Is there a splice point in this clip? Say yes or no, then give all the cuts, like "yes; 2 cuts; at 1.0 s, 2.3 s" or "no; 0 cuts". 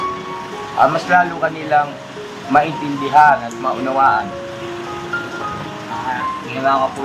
no; 0 cuts